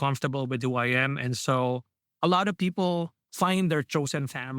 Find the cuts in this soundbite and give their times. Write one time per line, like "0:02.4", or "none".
0:02.0
0:03.2